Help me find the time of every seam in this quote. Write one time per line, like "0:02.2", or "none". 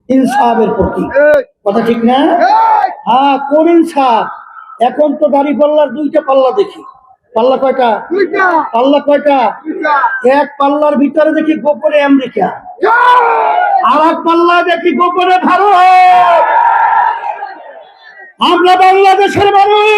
none